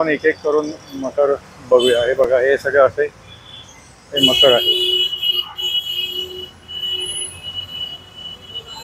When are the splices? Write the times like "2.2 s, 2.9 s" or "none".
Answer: none